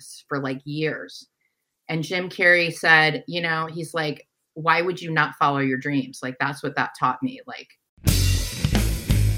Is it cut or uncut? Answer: cut